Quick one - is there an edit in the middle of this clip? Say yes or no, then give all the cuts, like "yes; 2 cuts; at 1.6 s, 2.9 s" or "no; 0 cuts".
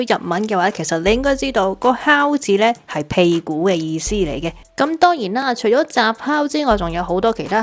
yes; 1 cut; at 4.6 s